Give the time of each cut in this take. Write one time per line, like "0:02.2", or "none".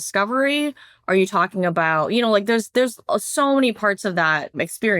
none